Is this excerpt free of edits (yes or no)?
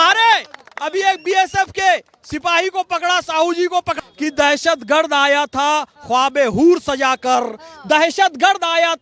no